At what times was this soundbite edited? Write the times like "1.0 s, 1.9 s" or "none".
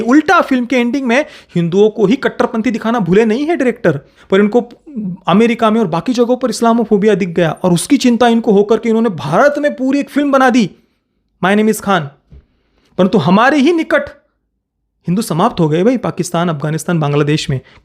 4.2 s